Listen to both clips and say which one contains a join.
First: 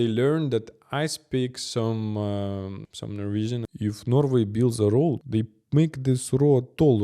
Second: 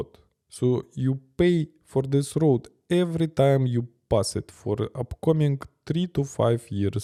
first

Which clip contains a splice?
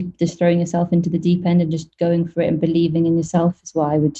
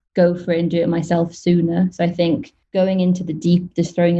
second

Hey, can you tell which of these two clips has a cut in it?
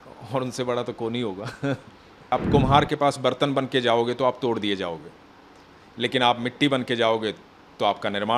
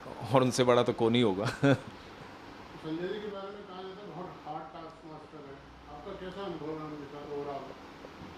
first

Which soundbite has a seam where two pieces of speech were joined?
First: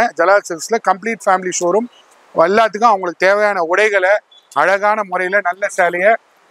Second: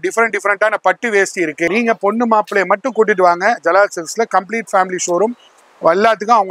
second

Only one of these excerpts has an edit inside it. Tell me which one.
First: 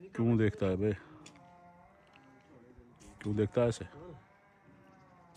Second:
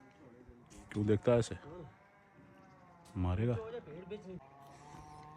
second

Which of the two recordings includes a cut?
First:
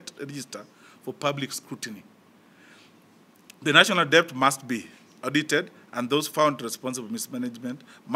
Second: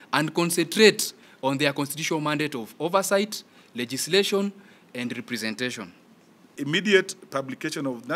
second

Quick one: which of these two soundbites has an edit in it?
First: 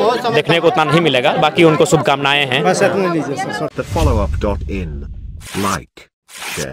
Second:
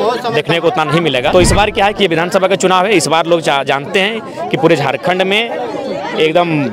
second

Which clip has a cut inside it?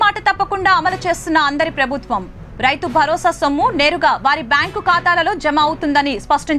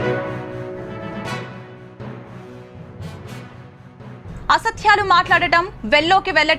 second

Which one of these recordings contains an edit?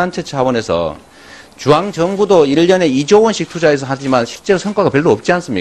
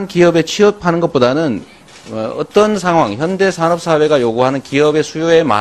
second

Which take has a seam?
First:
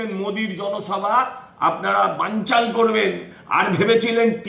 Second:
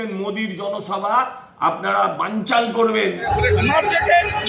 second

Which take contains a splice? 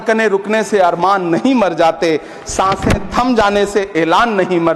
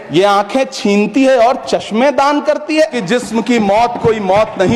second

